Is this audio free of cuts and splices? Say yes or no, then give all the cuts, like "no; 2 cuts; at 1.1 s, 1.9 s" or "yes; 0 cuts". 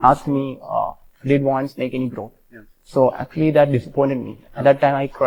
yes; 0 cuts